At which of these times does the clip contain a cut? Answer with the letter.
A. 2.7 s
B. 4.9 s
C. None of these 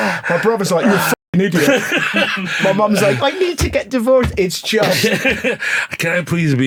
C